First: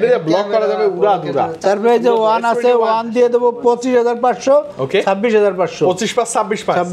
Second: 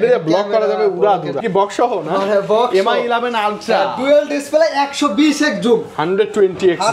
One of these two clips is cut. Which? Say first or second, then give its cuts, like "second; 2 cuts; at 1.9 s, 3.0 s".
second; 1 cut; at 1.4 s